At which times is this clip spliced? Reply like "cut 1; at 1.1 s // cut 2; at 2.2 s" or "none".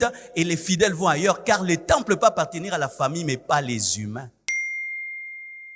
none